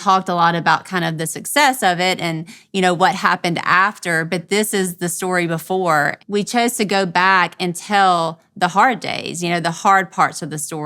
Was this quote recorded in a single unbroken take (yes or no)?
no